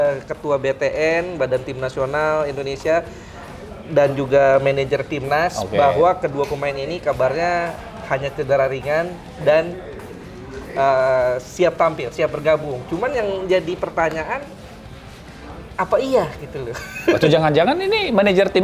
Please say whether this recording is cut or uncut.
uncut